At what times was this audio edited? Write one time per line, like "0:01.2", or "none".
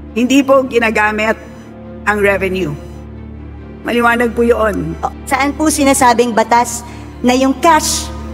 0:05.0

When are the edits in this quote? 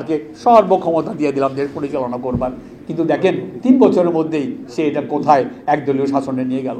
none

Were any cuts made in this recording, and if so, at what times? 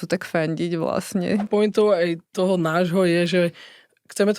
0:01.5

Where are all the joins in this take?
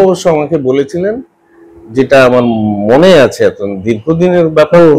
none

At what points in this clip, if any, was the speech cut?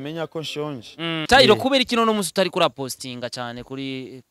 0:01.2

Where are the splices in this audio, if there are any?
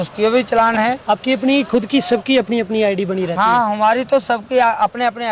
none

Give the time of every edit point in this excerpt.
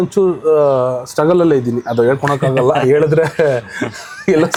none

